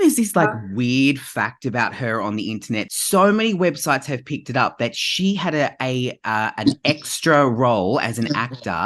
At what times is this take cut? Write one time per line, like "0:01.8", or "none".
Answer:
0:02.9